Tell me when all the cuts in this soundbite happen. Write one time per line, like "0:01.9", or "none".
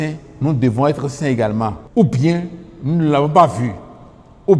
0:01.8